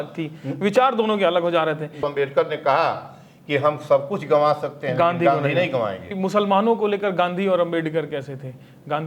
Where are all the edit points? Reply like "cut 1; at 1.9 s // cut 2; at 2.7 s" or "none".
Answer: cut 1; at 2.0 s // cut 2; at 6.0 s